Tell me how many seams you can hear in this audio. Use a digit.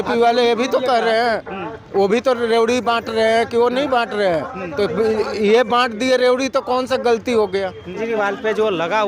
1